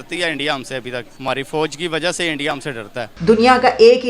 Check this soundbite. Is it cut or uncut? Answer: cut